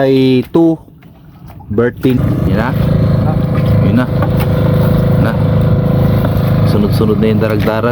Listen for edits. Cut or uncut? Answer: cut